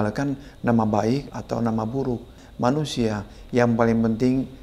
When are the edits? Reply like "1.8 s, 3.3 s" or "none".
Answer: 1.3 s, 2.4 s